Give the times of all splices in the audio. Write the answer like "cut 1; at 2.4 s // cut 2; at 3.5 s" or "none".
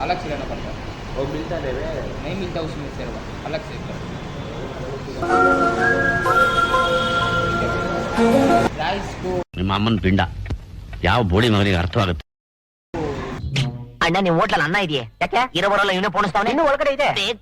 cut 1; at 5.2 s // cut 2; at 8.7 s // cut 3; at 13.4 s